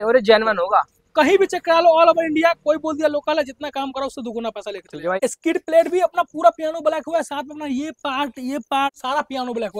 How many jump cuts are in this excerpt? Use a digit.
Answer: 2